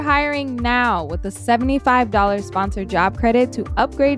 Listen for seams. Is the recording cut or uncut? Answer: uncut